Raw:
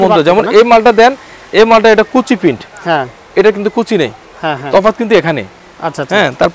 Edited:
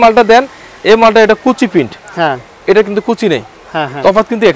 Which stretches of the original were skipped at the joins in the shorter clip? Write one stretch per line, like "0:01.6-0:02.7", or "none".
none